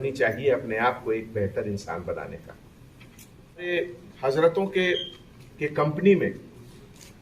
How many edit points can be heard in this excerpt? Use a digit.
1